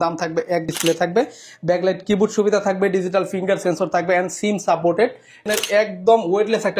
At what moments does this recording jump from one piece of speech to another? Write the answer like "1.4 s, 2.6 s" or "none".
0.7 s, 5.4 s